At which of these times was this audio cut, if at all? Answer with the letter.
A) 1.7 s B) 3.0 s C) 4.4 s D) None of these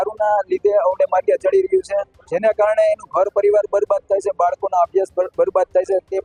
D